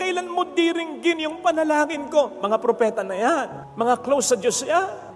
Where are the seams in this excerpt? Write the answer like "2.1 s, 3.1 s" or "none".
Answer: none

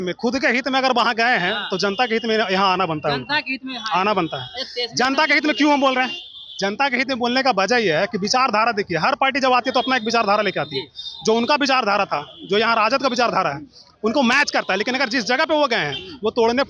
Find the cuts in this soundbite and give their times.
none

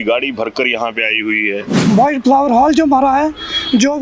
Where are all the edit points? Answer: 1.7 s

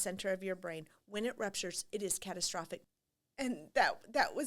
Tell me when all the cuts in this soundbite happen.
2.8 s

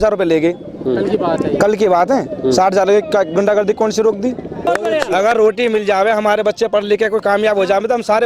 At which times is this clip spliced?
4.7 s

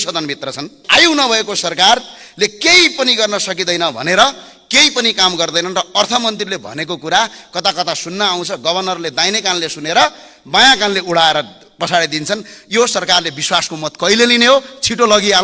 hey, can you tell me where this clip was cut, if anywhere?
1.0 s

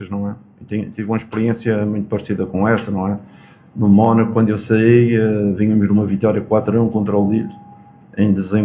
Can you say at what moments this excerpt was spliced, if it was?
1.2 s

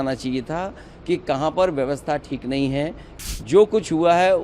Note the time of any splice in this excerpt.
3.1 s

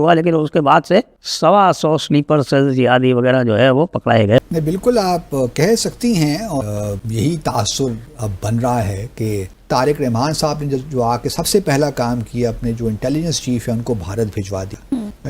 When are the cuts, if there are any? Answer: 1.2 s, 4.4 s, 6.5 s, 9.5 s

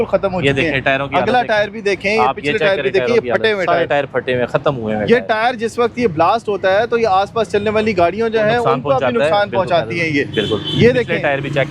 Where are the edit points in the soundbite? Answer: none

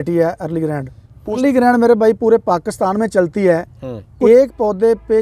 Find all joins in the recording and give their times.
1.4 s, 4.1 s

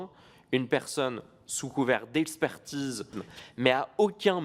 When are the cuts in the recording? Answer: 3.2 s

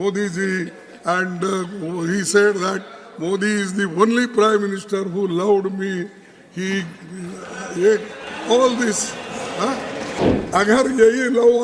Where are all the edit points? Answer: 10.2 s

